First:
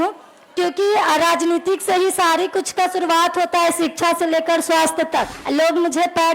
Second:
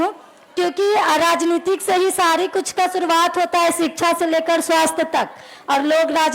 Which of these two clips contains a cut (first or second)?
first